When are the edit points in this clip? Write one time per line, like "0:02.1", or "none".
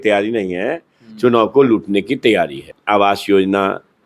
0:02.7